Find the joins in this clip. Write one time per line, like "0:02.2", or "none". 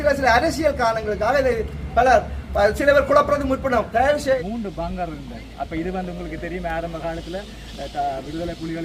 0:04.4